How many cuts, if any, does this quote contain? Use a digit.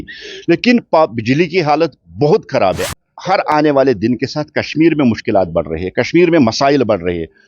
1